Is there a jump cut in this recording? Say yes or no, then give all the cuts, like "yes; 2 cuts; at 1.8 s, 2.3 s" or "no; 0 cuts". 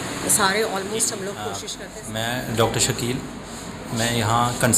yes; 1 cut; at 1.7 s